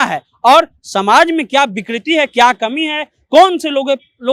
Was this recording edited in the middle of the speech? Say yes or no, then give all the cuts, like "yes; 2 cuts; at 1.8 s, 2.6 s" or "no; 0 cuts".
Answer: no; 0 cuts